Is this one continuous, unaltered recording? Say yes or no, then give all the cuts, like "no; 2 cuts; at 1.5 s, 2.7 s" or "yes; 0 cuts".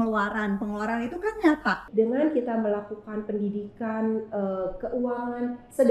no; 1 cut; at 1.8 s